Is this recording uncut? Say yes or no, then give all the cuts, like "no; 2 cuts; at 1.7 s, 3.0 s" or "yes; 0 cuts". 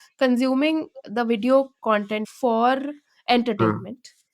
no; 1 cut; at 2.2 s